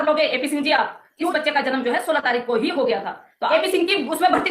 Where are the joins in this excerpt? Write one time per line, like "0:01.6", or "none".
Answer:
0:01.3
0:03.5